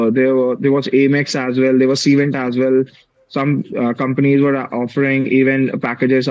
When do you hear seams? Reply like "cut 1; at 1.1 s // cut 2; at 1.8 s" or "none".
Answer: none